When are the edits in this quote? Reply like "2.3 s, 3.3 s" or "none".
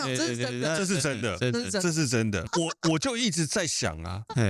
2.4 s